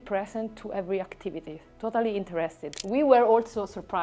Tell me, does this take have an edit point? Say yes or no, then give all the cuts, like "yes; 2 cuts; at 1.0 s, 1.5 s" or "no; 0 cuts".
yes; 1 cut; at 2.7 s